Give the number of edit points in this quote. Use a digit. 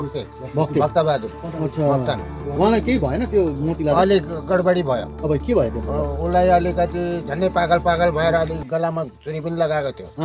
0